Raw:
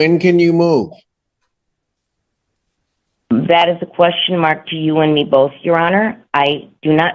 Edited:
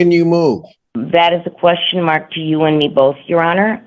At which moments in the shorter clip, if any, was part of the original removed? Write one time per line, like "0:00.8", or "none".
0:01.3